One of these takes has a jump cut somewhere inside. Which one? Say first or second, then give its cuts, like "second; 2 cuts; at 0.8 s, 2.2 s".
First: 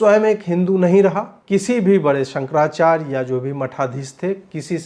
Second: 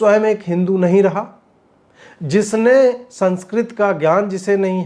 first; 1 cut; at 1.3 s